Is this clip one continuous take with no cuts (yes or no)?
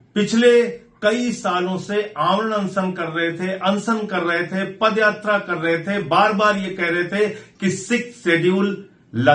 yes